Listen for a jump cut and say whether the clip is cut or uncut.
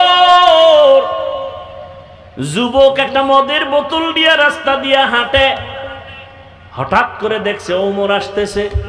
uncut